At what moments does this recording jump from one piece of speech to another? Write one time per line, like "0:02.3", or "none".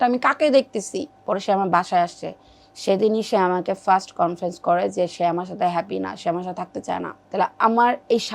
0:01.1
0:07.2